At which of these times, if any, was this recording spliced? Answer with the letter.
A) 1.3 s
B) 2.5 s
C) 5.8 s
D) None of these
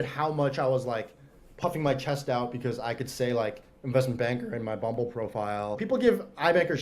C